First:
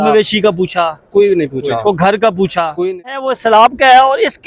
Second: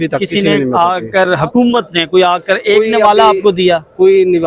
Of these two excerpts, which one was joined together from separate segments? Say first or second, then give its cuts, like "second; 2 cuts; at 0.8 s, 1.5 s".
first; 1 cut; at 3.3 s